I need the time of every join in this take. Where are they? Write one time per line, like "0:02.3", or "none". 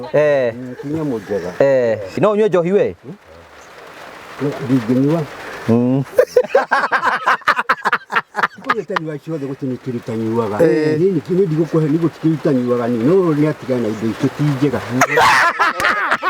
0:02.2